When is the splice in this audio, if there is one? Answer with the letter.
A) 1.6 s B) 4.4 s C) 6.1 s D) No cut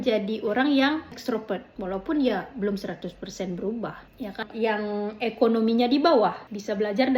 B